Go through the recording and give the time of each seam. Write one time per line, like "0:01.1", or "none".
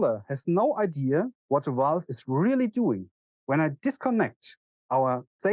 0:01.4